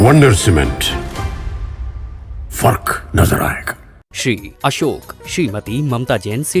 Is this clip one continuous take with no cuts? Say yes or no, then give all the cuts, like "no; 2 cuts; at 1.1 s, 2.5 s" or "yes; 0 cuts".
yes; 0 cuts